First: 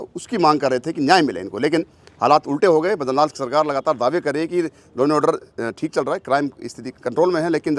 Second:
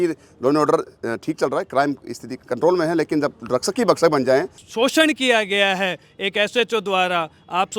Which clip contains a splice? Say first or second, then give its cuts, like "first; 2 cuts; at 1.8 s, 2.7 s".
second; 1 cut; at 4.6 s